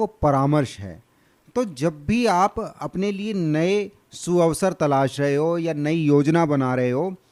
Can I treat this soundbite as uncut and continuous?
yes; 0 cuts

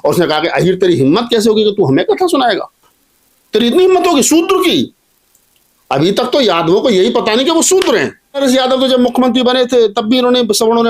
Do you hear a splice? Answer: yes; 1 cut; at 8.4 s

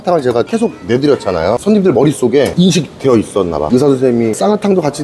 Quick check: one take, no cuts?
no; 2 cuts; at 1.6 s, 3.7 s

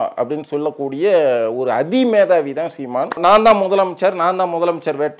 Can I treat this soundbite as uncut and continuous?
no; 1 cut; at 3.2 s

